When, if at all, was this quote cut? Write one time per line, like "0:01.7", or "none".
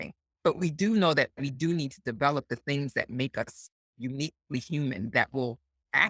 none